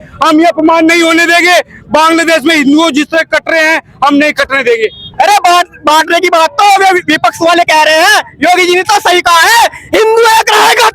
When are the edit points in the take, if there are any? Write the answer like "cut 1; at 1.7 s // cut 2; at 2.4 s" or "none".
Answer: cut 1; at 5.1 s

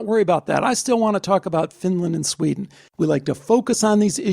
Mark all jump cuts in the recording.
cut 1; at 2.8 s

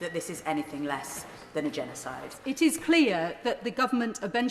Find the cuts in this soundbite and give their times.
cut 1; at 2.4 s

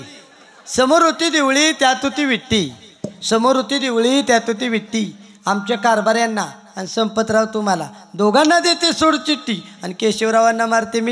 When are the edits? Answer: none

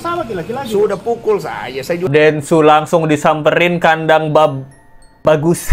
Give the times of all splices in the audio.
cut 1; at 2.1 s

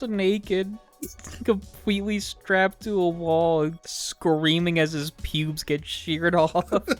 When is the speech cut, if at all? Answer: none

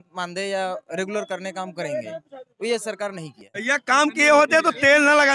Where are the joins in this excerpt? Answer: cut 1; at 3.6 s

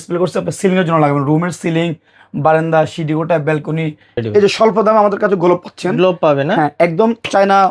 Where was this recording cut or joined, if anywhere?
cut 1; at 4.0 s

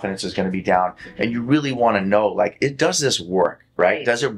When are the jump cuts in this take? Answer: none

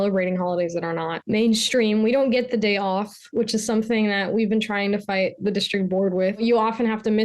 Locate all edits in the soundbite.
cut 1; at 1.2 s // cut 2; at 6.4 s

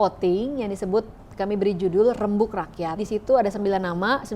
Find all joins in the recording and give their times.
cut 1; at 3.0 s

